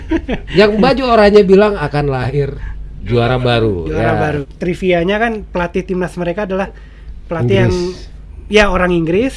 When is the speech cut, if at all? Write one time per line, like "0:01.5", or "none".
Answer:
0:04.4